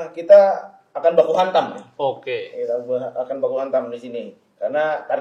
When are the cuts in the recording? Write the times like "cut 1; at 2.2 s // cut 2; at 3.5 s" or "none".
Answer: none